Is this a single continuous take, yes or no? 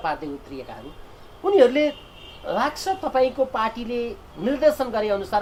yes